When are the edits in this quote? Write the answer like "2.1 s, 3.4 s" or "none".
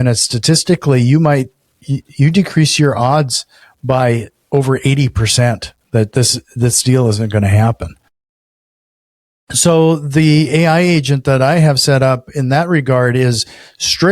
none